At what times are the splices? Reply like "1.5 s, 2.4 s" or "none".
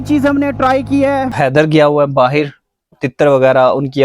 1.4 s, 3.0 s